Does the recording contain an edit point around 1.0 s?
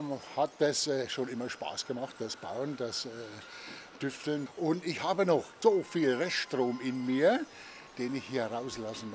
no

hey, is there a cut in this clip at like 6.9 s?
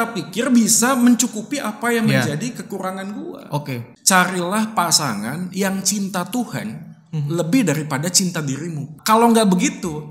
no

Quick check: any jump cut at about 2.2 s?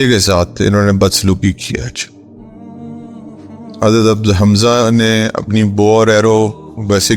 yes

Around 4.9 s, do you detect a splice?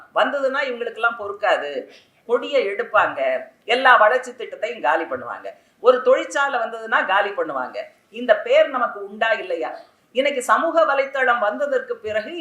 no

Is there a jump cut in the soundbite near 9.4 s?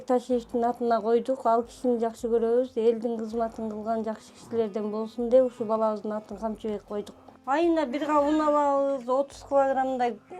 no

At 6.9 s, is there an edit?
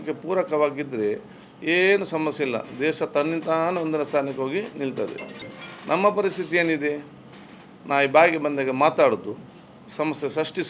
no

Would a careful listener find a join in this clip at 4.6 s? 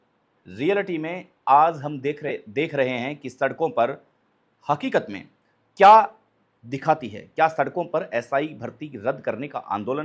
no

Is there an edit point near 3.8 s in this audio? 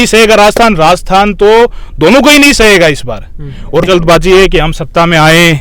yes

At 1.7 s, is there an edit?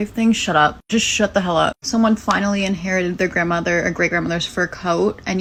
no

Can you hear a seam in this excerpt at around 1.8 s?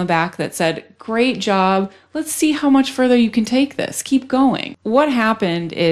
no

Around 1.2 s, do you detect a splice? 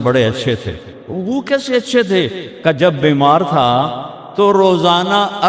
yes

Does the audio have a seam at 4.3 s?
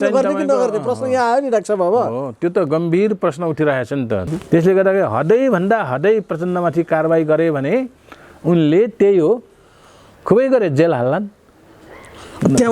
yes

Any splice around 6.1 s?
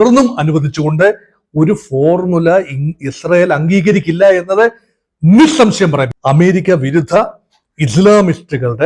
yes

